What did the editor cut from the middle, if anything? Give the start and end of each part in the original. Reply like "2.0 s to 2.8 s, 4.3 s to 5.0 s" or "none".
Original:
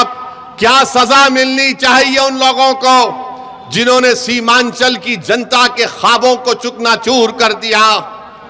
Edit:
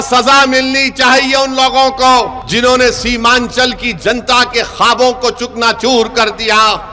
3.2 s to 3.6 s